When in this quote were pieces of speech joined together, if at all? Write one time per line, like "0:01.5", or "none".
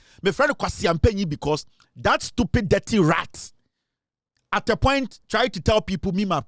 none